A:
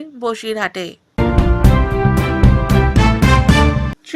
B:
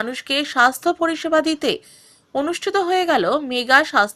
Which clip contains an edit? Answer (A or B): A